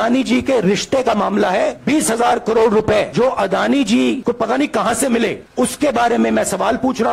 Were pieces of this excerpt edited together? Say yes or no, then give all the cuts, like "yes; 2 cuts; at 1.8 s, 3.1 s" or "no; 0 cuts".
yes; 1 cut; at 4.2 s